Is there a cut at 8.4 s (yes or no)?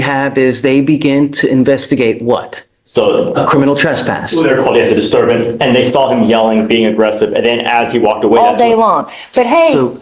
yes